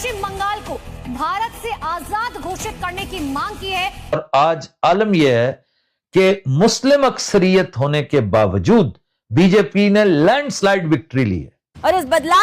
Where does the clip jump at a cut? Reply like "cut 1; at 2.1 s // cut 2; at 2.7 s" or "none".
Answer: cut 1; at 4.1 s

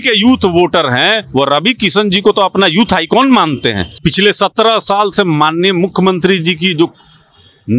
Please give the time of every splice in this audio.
cut 1; at 3.9 s

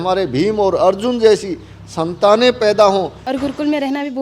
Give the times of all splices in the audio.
cut 1; at 3.2 s

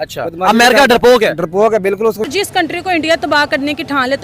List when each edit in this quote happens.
cut 1; at 2.3 s

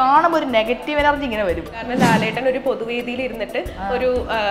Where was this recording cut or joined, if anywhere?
cut 1; at 1.9 s

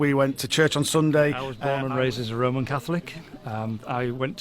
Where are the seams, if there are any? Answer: cut 1; at 1.5 s

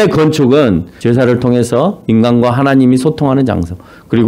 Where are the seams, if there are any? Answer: cut 1; at 0.9 s

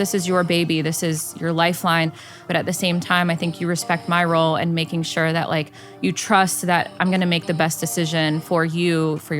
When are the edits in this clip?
cut 1; at 2.4 s

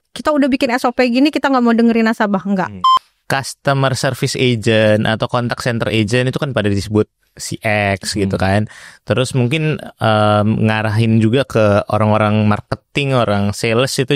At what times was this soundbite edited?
cut 1; at 2.8 s

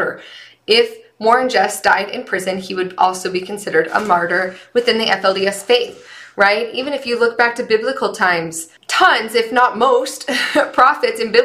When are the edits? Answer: none

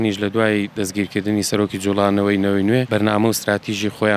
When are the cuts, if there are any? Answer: cut 1; at 2.9 s

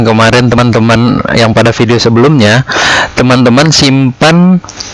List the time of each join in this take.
none

